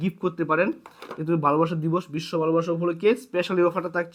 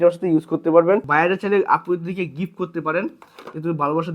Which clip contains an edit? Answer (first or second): second